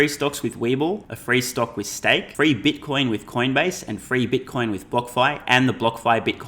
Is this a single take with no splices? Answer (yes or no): no